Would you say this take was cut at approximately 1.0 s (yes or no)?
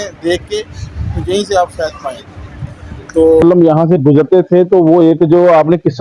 no